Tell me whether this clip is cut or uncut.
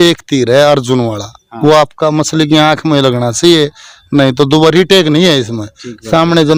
uncut